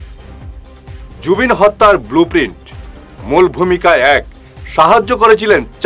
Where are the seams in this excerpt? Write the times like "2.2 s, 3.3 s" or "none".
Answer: none